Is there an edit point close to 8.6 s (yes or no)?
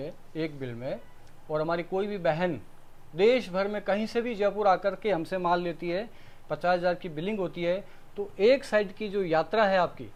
no